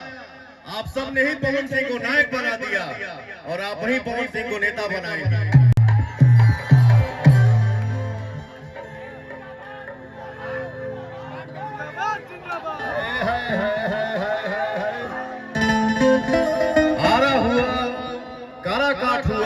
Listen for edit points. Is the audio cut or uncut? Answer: uncut